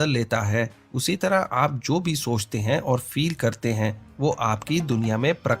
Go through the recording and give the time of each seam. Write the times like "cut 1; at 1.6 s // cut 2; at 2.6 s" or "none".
none